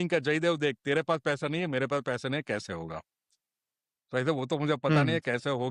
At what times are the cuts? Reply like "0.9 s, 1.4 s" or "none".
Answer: none